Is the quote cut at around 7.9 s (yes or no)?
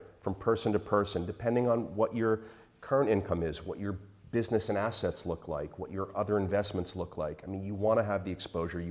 no